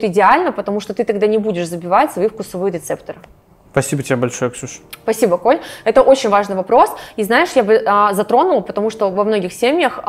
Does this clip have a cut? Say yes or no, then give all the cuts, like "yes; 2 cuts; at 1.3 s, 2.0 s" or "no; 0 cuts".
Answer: no; 0 cuts